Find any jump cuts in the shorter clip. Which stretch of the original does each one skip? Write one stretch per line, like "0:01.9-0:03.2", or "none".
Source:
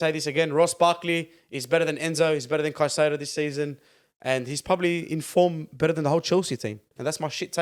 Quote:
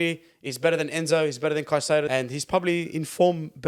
0:03.2-0:04.2